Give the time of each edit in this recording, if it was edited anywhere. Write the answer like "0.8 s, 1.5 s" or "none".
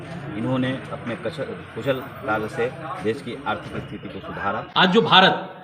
4.6 s